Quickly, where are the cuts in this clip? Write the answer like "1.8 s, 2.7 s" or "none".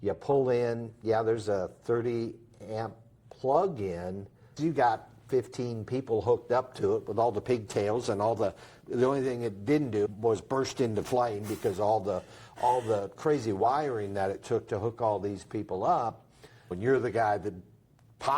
4.5 s, 10.1 s, 16.7 s